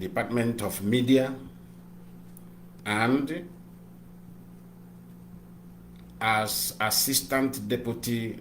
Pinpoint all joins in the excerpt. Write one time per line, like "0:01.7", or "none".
0:02.8